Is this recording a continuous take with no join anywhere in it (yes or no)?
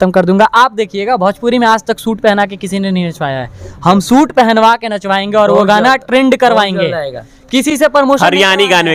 yes